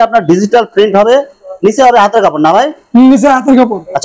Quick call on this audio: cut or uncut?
uncut